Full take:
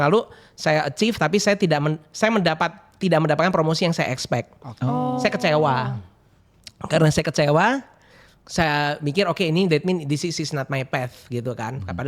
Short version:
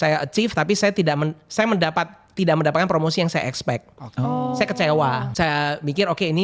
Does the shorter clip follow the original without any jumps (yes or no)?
no